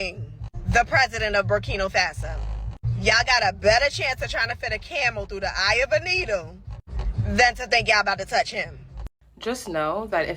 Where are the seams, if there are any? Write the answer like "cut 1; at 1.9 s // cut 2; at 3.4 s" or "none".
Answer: cut 1; at 9.0 s